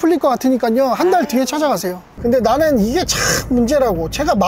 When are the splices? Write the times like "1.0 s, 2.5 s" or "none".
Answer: 2.1 s